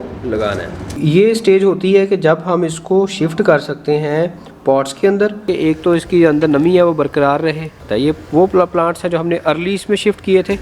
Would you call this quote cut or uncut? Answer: cut